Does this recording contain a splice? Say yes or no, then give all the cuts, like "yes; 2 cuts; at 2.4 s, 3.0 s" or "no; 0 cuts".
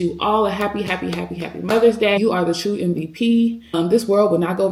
yes; 2 cuts; at 2.2 s, 3.7 s